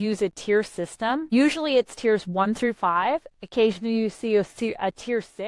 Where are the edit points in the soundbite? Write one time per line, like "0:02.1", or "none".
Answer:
0:01.3